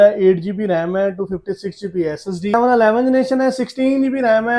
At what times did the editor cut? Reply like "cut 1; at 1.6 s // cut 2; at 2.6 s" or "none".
cut 1; at 2.5 s